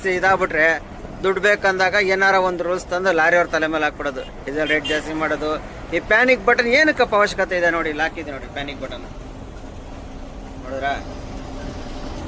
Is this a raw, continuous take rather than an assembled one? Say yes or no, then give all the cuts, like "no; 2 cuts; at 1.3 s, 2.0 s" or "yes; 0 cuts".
yes; 0 cuts